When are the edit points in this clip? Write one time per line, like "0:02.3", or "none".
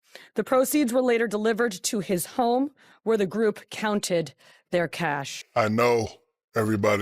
0:05.3